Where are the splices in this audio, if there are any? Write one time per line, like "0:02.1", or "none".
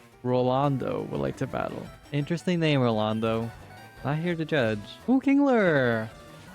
0:04.9